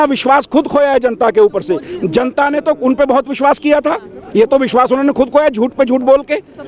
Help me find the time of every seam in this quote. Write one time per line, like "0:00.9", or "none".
none